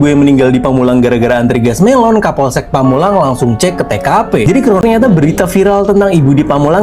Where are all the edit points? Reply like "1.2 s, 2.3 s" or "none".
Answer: 4.8 s

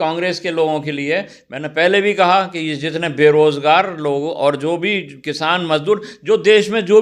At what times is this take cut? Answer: none

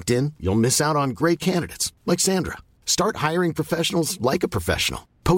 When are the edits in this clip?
none

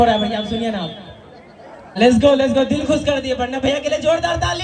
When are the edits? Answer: 2.0 s

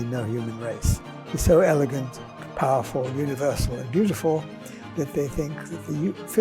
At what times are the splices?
1.0 s

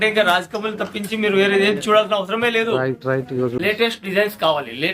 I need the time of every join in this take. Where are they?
3.6 s

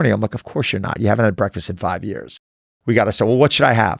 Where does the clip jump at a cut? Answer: none

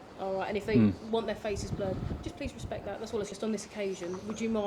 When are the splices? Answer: 3.3 s

